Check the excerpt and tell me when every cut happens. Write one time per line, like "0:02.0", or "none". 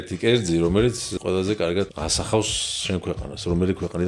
0:01.1
0:01.9